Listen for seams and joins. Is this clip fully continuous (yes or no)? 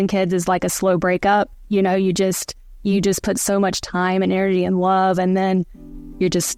yes